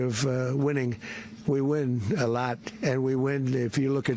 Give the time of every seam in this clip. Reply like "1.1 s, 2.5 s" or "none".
none